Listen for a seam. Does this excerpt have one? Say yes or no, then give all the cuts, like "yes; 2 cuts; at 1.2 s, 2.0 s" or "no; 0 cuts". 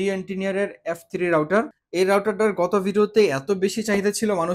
yes; 1 cut; at 1.8 s